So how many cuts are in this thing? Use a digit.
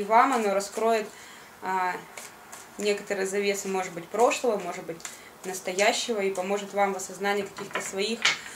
1